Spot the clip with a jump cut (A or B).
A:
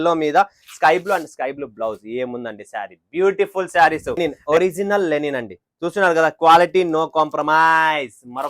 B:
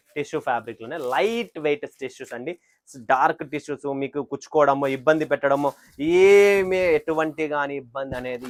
A